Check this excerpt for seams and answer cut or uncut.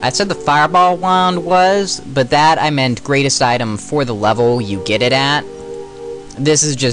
uncut